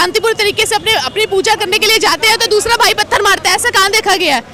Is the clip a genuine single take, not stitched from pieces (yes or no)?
yes